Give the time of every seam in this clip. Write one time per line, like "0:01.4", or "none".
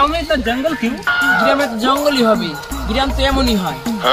none